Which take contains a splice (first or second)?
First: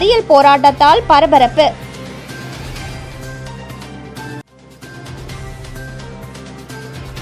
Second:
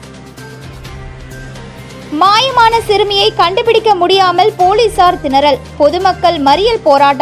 second